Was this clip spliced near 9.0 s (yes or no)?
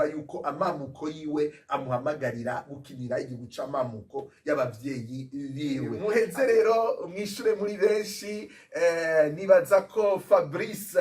no